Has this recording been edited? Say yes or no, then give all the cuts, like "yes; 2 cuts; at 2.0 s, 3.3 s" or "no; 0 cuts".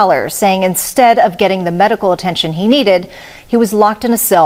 no; 0 cuts